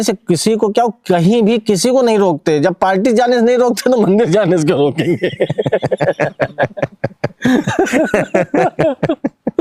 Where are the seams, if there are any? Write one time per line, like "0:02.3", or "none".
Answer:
none